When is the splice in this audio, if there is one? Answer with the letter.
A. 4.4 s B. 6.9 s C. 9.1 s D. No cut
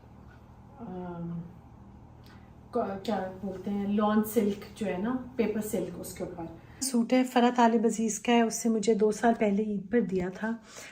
B